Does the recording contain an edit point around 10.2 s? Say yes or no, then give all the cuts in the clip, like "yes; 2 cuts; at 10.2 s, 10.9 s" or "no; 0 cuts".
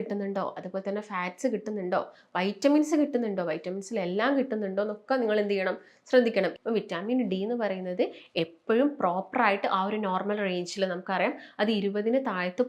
no; 1 cut; at 6.5 s